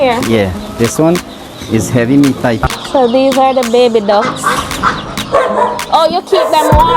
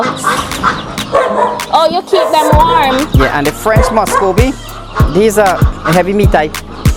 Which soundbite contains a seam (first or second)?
first